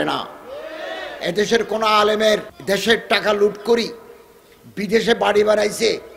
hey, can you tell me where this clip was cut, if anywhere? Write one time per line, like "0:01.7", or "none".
0:02.5